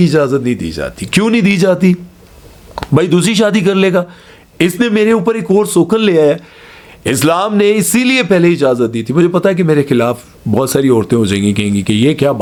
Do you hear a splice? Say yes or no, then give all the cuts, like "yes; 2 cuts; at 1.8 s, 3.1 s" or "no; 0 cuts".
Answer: no; 0 cuts